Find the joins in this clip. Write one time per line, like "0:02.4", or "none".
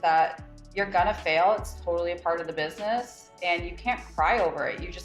none

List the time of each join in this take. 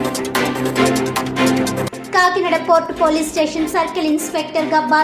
0:01.8

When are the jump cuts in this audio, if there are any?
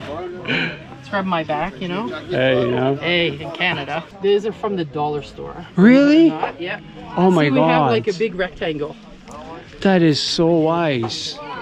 0:04.0

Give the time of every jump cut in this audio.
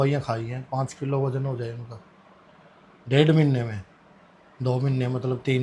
none

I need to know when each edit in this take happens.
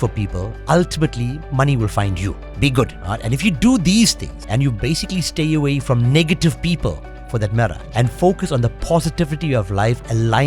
0:02.4
0:03.0
0:04.3
0:07.8

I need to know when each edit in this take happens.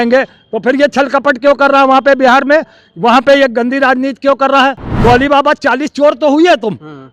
0:04.9

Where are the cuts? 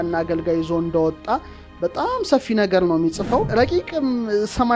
0:03.5

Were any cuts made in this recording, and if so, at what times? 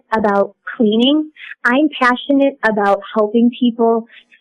none

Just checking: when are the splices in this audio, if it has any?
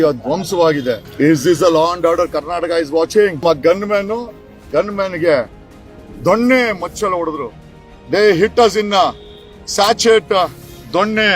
0:01.1
0:03.4

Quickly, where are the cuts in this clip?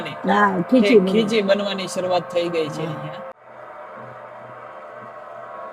none

